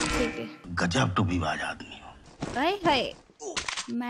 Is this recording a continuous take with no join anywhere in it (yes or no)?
no